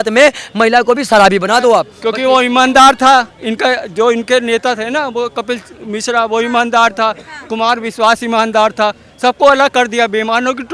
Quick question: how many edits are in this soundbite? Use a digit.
1